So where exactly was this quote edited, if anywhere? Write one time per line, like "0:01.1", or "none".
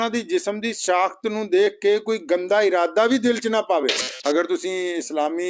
0:04.1